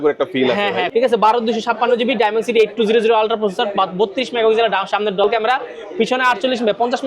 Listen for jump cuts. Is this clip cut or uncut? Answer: cut